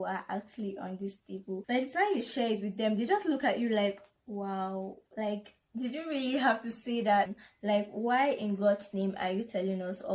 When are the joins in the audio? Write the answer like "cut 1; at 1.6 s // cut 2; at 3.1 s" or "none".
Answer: cut 1; at 1.6 s // cut 2; at 7.3 s